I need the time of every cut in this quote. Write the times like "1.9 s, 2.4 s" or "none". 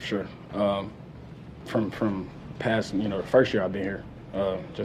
none